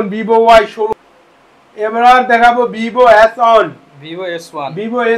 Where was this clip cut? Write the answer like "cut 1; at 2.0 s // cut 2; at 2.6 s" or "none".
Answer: cut 1; at 0.9 s

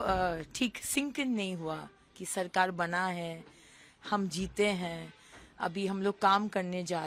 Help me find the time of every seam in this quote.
none

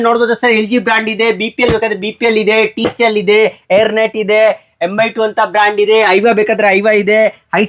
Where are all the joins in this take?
none

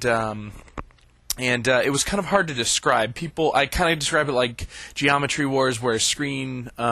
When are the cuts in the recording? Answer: cut 1; at 3.0 s

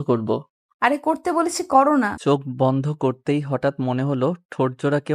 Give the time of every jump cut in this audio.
cut 1; at 2.1 s

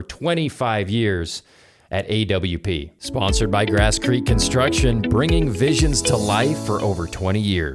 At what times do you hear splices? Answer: cut 1; at 3.0 s

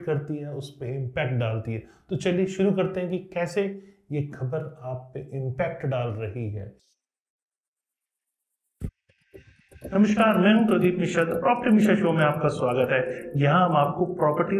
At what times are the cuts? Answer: none

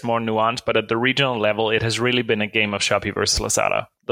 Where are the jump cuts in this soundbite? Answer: none

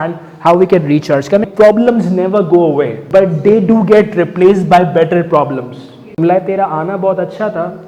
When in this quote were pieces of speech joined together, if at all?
cut 1; at 1.5 s // cut 2; at 3.0 s // cut 3; at 6.2 s

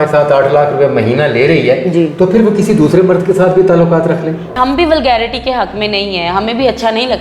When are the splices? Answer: cut 1; at 4.4 s

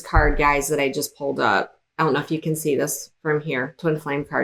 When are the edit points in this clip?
none

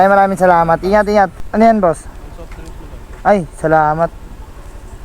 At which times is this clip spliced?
cut 1; at 1.4 s

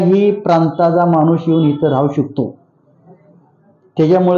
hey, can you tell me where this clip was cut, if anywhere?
none

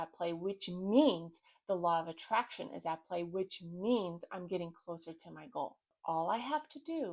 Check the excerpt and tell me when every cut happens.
cut 1; at 6.0 s

